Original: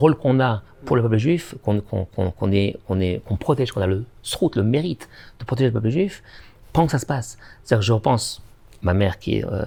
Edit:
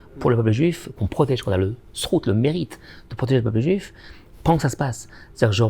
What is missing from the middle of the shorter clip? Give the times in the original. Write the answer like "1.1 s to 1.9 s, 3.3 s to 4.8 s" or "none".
1.6 s to 3.2 s